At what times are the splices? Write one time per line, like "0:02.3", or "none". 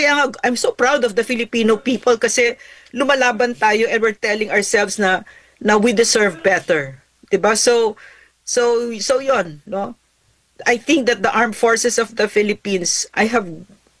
none